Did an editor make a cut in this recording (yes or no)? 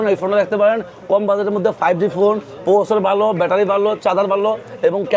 no